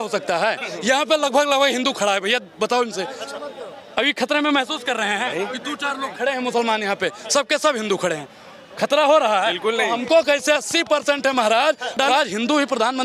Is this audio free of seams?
no; 1 cut; at 12.1 s

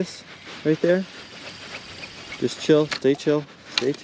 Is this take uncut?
yes; 0 cuts

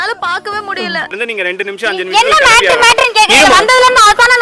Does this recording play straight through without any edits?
no; 1 cut; at 1.1 s

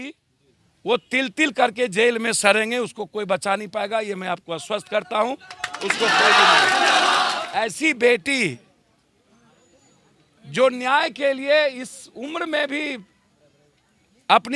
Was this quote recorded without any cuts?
no; 1 cut; at 7.4 s

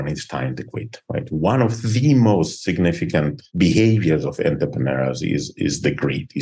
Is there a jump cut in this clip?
no; 0 cuts

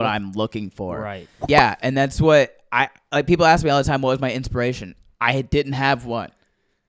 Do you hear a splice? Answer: yes; 1 cut; at 1.4 s

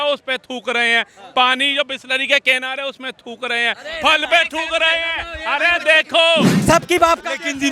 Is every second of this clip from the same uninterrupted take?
no; 1 cut; at 6.6 s

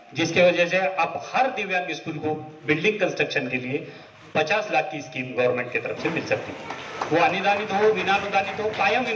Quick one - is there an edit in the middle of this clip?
no; 0 cuts

